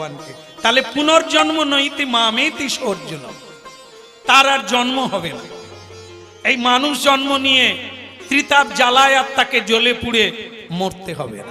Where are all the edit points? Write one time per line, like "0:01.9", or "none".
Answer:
none